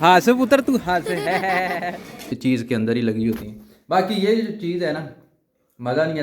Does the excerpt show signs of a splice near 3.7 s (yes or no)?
no